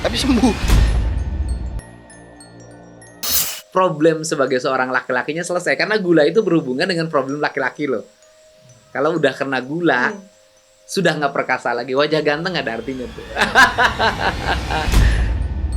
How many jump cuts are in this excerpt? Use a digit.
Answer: 1